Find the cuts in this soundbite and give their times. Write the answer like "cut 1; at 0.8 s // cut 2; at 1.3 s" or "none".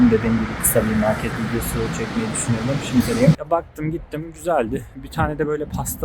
cut 1; at 3.4 s